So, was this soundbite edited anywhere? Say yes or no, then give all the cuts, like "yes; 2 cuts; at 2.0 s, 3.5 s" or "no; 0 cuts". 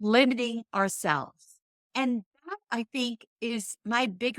yes; 1 cut; at 1.9 s